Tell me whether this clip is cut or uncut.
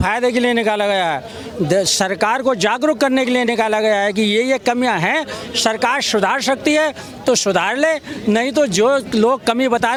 uncut